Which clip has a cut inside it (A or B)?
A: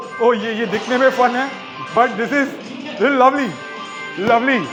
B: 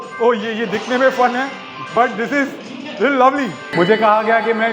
B